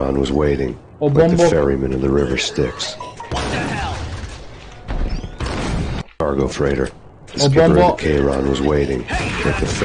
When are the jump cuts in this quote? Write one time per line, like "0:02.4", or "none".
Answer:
none